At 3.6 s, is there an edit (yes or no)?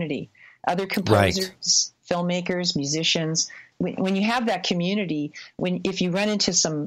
yes